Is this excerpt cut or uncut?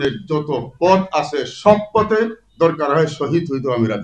uncut